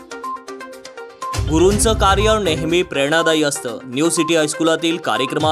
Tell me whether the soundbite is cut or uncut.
cut